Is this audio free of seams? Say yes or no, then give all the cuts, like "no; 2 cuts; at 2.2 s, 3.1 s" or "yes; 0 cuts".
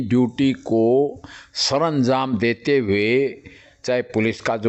yes; 0 cuts